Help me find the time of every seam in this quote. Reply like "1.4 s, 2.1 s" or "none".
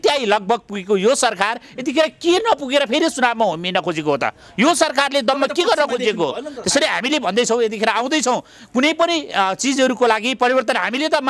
none